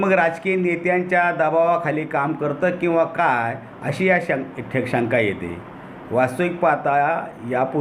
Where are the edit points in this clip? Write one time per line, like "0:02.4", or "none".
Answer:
none